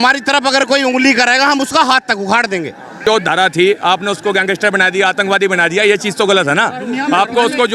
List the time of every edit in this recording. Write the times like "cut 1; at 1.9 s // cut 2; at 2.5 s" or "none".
cut 1; at 3.0 s